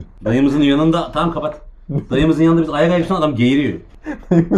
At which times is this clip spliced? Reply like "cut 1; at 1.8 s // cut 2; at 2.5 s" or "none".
none